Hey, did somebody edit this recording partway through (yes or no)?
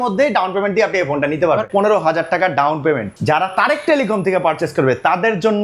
yes